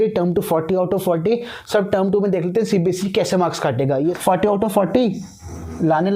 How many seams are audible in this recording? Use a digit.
1